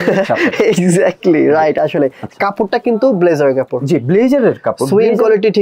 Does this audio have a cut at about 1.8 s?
no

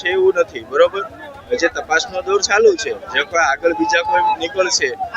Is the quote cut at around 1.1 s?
no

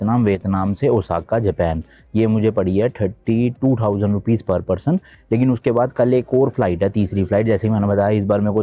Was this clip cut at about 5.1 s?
no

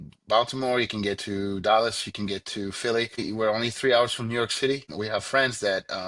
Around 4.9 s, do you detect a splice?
yes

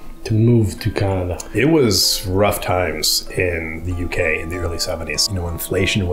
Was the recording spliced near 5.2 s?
yes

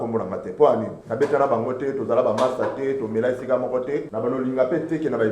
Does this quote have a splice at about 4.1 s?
yes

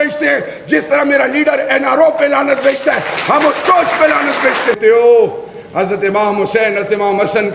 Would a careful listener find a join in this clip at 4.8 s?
yes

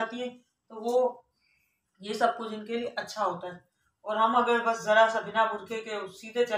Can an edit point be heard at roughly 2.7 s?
no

